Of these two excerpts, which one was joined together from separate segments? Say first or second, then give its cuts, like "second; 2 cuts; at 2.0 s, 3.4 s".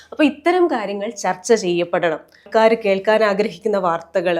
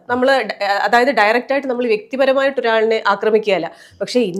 first; 1 cut; at 2.4 s